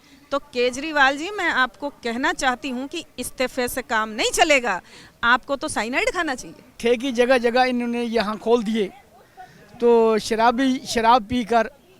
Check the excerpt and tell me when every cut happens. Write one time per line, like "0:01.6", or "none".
0:06.8